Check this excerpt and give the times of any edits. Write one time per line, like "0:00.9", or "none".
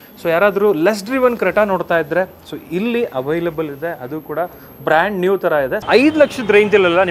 0:05.8